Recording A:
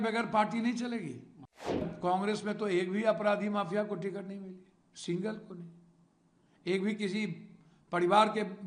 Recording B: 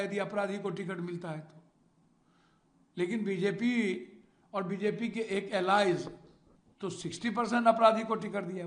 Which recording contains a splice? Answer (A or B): A